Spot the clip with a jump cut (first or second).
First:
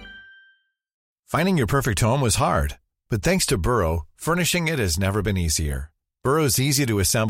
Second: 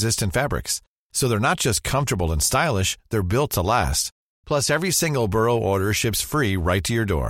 first